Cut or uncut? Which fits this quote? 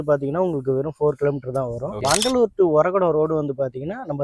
cut